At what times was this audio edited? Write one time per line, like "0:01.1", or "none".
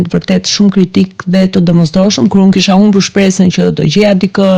none